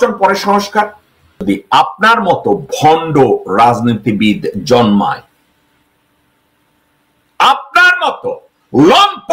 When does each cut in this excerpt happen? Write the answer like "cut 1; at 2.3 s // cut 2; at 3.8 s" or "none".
cut 1; at 1.4 s